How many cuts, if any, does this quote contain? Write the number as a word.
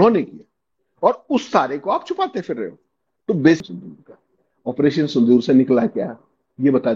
one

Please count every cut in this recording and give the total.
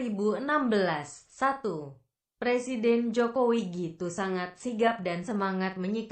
one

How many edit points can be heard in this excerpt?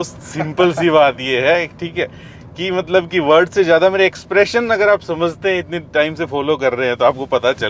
zero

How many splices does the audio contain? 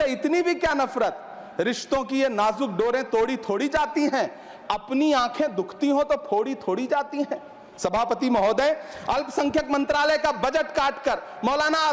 zero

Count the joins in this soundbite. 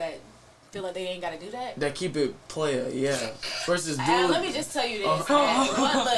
zero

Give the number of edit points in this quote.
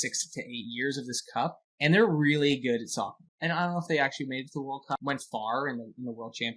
three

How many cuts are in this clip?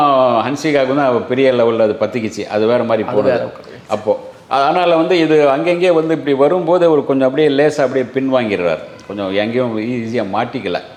zero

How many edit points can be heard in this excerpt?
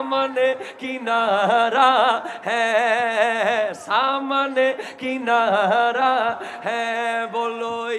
zero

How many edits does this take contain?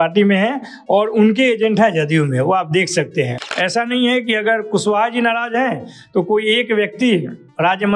one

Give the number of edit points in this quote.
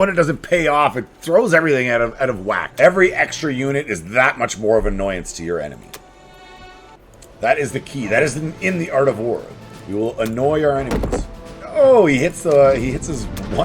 one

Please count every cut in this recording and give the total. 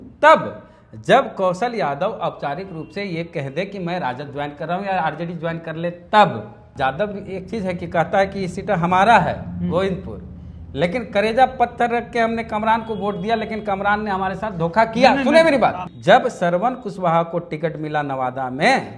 two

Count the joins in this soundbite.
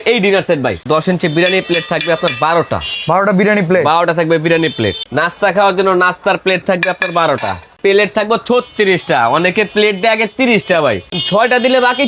four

